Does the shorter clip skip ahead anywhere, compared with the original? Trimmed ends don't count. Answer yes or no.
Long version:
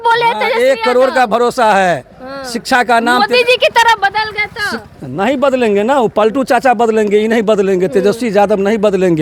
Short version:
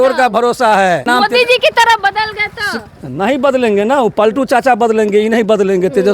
yes